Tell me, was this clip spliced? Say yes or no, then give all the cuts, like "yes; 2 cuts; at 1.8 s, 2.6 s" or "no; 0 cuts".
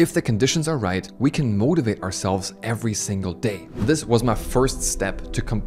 yes; 2 cuts; at 1.1 s, 3.7 s